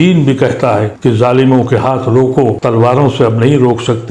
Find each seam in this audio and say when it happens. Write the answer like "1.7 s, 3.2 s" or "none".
0.9 s, 2.6 s